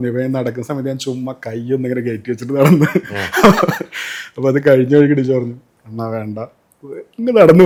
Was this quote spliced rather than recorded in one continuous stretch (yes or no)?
no